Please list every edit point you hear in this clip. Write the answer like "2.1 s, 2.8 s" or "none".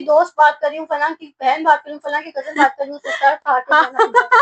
none